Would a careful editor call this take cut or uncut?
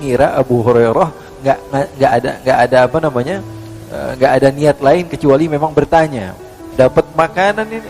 cut